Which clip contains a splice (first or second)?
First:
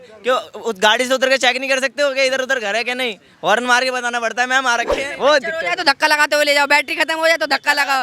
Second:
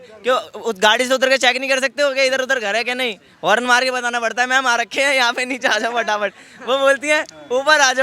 first